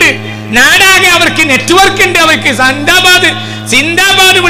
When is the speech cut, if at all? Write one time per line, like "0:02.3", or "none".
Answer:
none